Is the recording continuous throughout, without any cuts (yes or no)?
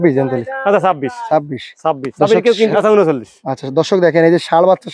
no